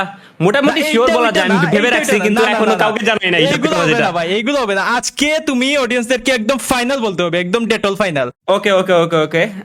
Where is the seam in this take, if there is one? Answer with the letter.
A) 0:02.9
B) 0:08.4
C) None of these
B